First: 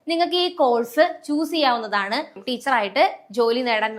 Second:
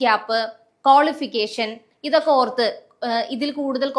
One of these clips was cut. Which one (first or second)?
first